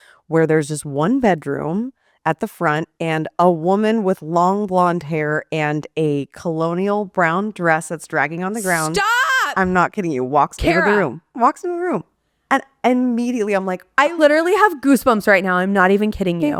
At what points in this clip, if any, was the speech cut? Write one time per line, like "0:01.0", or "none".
none